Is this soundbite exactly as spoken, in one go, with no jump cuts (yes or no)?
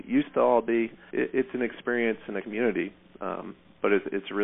no